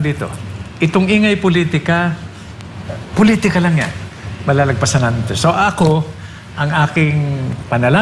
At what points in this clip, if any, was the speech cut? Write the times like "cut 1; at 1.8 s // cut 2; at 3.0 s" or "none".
none